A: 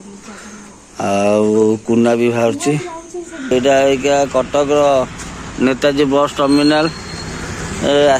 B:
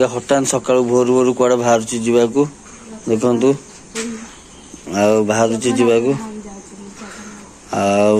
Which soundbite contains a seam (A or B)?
A